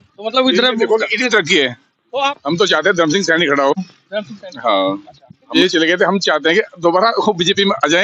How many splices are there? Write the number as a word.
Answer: two